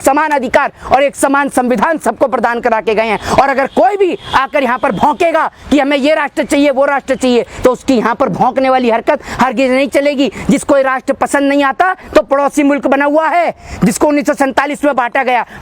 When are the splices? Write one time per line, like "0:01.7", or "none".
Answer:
none